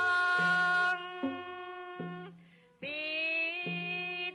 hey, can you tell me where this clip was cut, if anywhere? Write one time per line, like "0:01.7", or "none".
none